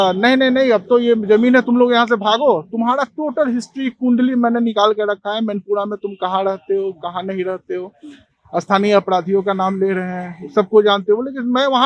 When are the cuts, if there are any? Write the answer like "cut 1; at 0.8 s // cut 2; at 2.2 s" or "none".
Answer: none